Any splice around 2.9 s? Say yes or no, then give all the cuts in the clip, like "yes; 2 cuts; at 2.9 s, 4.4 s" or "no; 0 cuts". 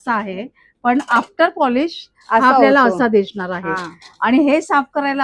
no; 0 cuts